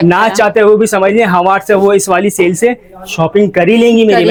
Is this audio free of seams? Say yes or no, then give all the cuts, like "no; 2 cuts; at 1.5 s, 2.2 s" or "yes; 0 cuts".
yes; 0 cuts